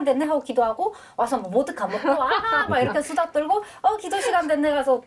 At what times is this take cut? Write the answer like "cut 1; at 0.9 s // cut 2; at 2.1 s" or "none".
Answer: none